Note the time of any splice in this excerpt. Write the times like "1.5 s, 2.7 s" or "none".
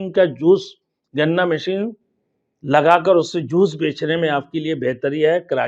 none